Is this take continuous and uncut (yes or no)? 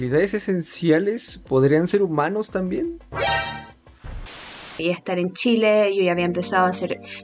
no